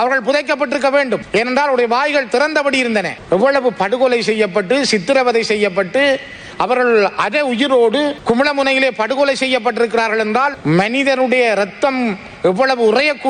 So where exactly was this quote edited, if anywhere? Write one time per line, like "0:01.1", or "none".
none